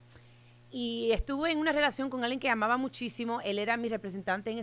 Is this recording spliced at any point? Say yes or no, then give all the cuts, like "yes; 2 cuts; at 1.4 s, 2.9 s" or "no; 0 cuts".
no; 0 cuts